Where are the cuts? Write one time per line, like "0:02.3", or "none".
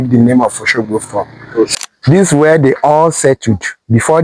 0:01.7

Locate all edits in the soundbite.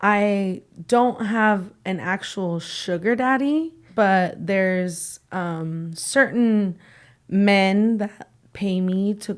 0:03.8

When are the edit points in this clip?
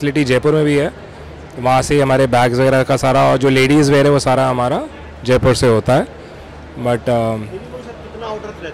none

